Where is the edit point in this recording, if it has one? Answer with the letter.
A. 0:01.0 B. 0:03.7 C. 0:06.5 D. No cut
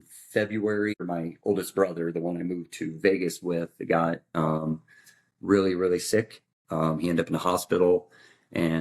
A